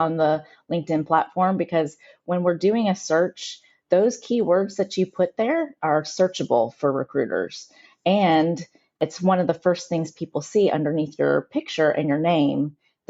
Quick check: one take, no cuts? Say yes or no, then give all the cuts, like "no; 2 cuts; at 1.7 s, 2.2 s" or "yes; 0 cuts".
yes; 0 cuts